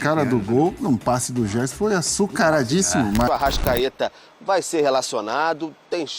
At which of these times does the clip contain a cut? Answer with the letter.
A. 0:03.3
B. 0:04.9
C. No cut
A